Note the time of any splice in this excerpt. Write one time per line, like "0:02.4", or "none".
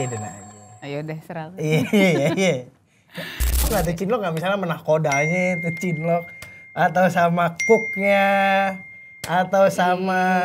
0:03.7